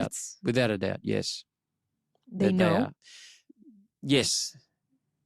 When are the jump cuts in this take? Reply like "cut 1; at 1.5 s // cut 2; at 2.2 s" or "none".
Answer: none